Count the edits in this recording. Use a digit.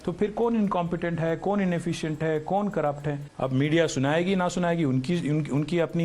1